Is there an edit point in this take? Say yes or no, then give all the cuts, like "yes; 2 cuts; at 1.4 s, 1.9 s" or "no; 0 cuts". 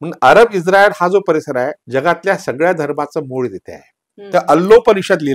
yes; 2 cuts; at 1.8 s, 4.1 s